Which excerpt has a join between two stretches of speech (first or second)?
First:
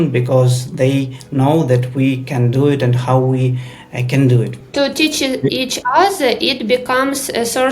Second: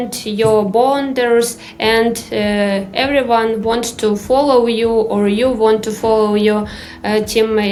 first